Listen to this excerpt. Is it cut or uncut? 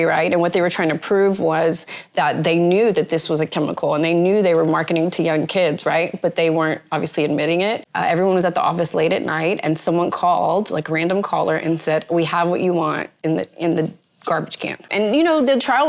cut